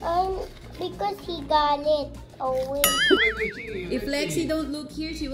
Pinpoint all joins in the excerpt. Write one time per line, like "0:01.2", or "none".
0:03.2